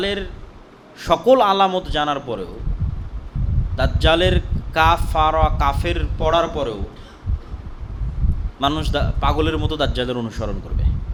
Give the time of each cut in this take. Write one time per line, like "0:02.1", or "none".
none